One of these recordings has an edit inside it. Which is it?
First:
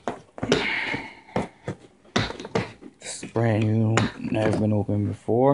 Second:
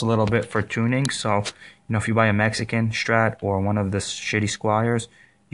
second; 1 cut; at 4.6 s

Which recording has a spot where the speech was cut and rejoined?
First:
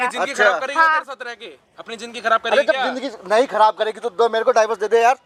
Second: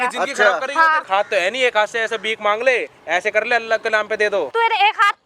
second; 2 cuts; at 1.0 s, 4.5 s

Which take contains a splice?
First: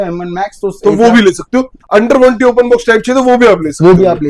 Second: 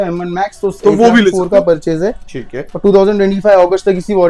second; 1 cut; at 1.4 s

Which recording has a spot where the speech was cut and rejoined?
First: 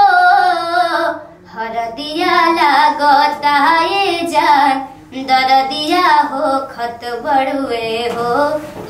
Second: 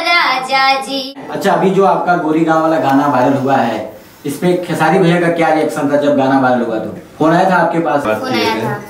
second; 3 cuts; at 1.3 s, 7.0 s, 8.0 s

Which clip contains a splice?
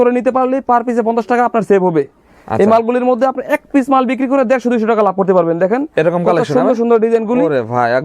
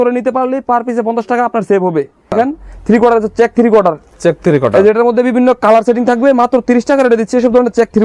second; 1 cut; at 2.3 s

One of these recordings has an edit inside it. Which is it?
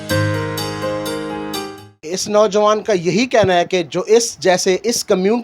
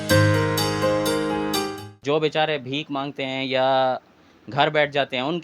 second; 1 cut; at 1.9 s

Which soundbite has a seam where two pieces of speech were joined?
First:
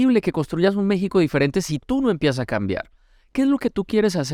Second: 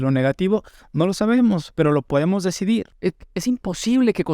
second; 1 cut; at 2.9 s

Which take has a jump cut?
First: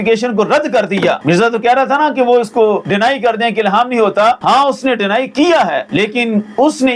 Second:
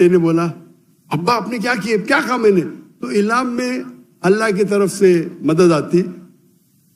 first; 4 cuts; at 1.2 s, 2.8 s, 4.4 s, 5.8 s

